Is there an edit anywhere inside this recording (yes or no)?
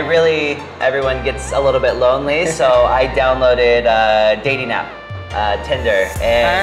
no